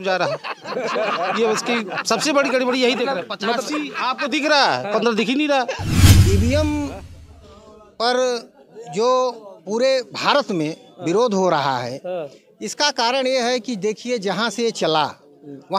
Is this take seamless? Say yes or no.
no